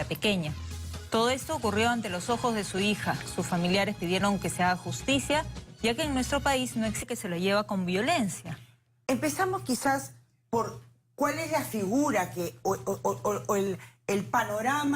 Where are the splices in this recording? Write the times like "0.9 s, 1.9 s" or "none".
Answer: none